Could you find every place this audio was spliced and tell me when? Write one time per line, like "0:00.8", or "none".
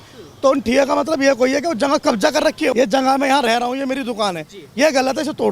0:02.7